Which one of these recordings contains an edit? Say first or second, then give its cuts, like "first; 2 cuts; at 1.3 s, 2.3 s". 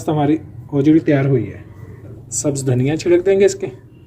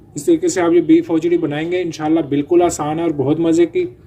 first; 1 cut; at 2.2 s